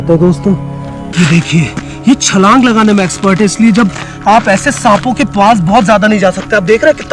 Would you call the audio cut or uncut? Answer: cut